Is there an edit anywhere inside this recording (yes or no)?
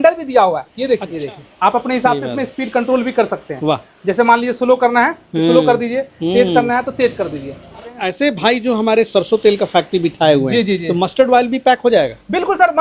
yes